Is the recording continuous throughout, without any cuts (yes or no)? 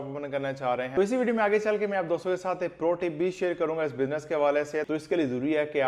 no